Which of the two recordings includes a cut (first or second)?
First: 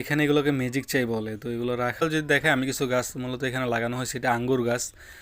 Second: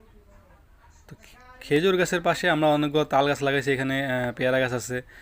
first